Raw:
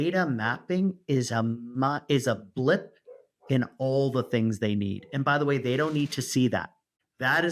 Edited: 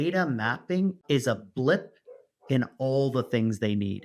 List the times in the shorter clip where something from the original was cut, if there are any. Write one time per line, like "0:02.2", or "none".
0:01.0